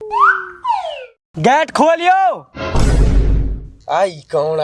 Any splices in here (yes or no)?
yes